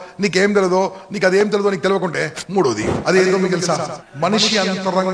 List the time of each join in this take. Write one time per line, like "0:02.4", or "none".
0:04.0

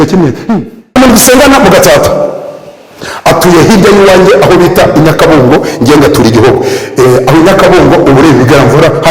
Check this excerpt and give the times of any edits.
0:01.0

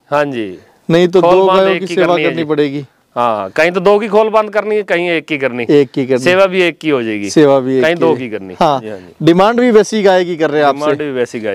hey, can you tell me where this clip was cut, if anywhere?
0:09.0

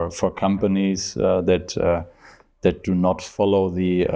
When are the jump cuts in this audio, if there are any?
none

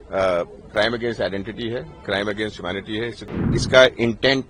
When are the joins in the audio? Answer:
0:03.5

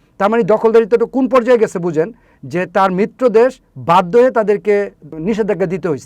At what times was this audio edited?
0:05.2

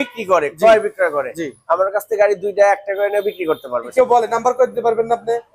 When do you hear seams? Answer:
0:03.8

